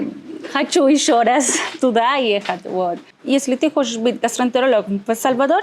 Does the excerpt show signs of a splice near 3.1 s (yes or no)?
yes